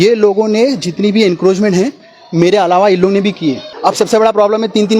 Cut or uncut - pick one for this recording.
cut